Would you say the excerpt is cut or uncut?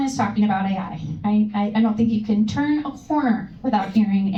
uncut